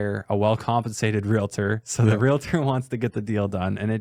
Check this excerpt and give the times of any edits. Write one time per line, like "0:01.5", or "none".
none